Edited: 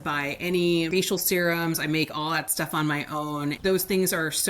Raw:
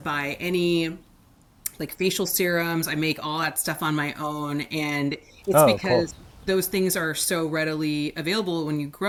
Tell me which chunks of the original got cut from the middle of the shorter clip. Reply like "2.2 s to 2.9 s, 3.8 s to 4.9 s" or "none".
0.9 s to 2.0 s, 4.6 s to 6.4 s